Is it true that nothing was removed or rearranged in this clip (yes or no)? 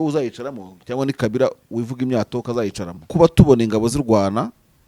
no